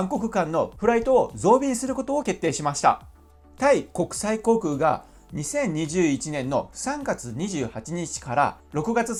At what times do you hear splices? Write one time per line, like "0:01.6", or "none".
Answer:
none